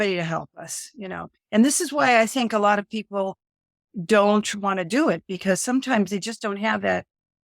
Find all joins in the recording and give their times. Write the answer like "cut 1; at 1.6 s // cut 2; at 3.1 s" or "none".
none